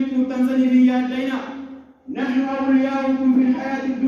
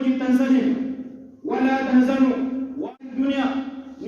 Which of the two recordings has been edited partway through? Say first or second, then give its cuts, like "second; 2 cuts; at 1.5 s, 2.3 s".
second; 1 cut; at 2.9 s